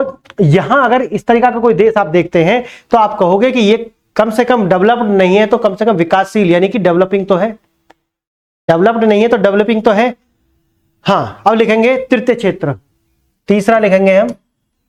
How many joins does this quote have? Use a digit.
0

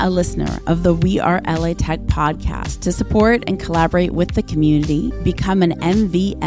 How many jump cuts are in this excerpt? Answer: 0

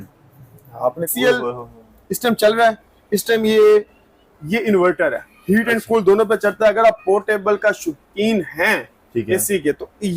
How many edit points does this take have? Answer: 1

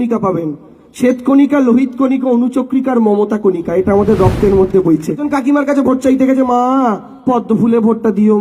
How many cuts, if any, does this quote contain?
1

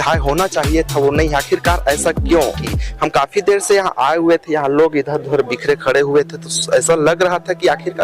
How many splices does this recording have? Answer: 1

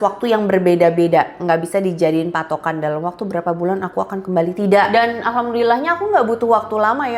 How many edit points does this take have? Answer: 1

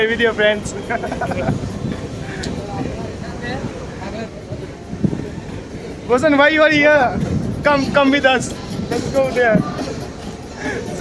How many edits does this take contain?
0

